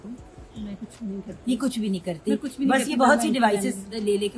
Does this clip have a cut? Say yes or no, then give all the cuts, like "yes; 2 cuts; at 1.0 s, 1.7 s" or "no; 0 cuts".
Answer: no; 0 cuts